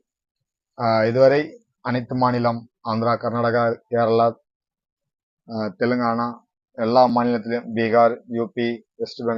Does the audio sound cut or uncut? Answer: uncut